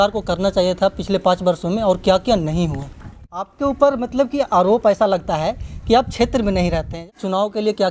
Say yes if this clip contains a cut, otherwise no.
yes